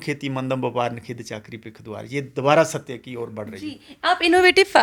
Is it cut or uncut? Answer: uncut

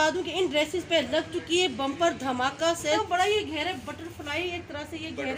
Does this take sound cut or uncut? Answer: cut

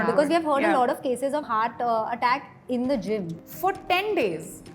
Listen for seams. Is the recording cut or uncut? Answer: cut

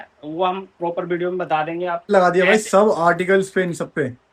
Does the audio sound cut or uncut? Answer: cut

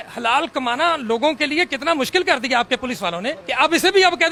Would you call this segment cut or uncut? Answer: uncut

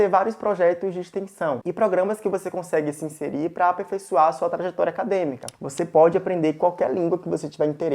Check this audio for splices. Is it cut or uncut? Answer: cut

